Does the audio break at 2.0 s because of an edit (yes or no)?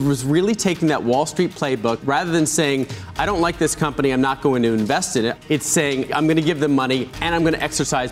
yes